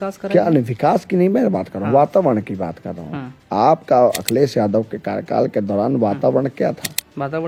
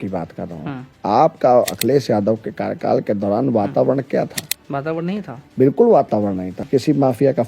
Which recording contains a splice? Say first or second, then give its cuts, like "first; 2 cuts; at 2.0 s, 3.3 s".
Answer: second; 1 cut; at 6.5 s